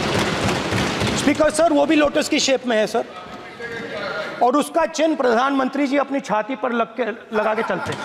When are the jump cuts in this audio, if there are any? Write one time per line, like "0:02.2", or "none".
none